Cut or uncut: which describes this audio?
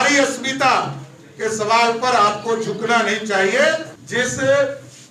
cut